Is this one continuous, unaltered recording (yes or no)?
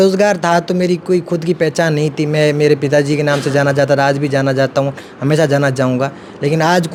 yes